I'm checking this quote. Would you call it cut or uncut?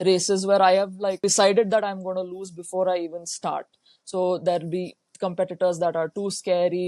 cut